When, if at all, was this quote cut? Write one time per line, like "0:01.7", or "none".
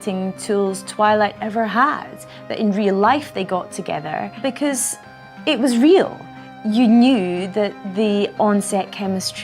none